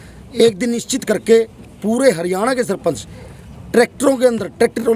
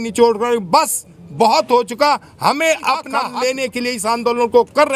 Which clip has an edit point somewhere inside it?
second; 1 cut; at 3.2 s

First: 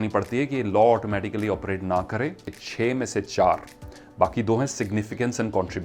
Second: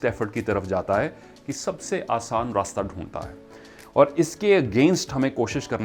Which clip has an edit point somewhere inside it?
first; 1 cut; at 2.5 s

